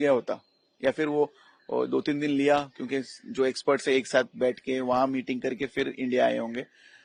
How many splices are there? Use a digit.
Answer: 0